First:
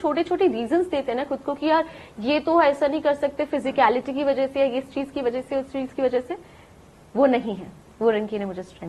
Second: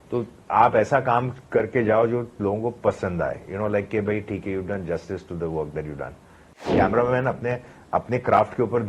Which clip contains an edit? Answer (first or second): second